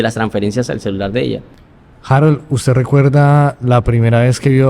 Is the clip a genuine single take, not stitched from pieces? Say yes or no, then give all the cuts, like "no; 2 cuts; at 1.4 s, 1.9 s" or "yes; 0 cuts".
no; 1 cut; at 1.6 s